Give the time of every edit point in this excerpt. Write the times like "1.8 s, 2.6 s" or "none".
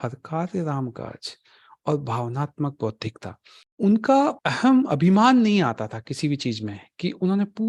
3.6 s, 4.4 s